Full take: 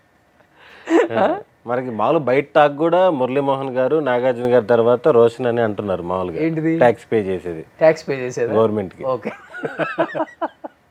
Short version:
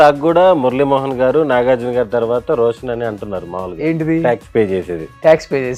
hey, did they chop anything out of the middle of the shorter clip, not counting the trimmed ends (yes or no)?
no